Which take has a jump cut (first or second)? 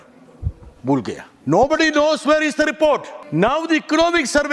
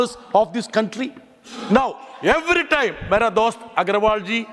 first